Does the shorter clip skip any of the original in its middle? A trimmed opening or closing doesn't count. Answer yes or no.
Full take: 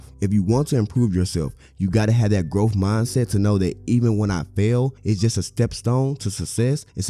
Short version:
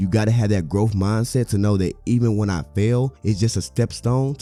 no